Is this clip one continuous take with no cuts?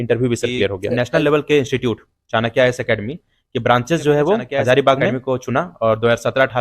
no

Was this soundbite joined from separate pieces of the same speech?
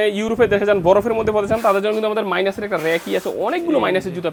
no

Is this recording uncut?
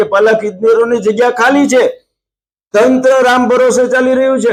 yes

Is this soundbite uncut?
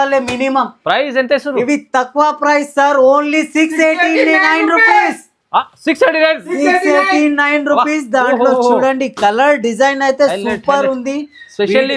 yes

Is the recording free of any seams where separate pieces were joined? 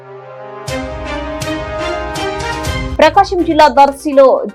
no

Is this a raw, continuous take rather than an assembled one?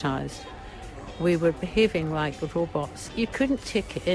no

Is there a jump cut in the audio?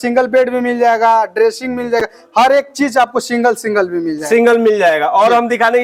no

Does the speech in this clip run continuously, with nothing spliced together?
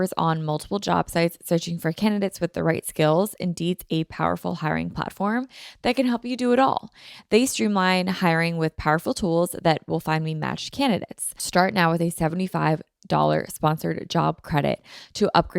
no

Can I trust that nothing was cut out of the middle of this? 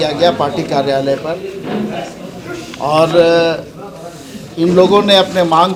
yes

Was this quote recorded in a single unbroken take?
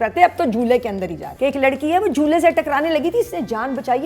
no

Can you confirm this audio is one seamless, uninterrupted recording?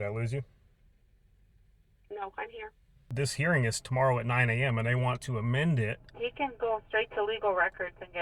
no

